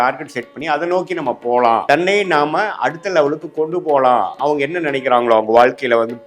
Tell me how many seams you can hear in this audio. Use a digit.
2